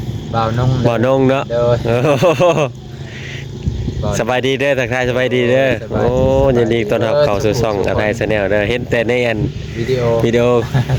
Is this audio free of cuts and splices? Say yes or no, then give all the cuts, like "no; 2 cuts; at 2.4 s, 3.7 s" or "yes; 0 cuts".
yes; 0 cuts